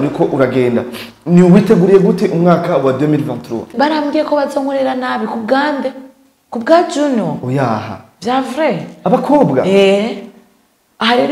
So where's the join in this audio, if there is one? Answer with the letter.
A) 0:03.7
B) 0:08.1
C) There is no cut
A